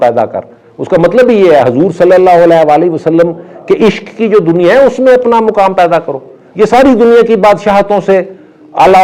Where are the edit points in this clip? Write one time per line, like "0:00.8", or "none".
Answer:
none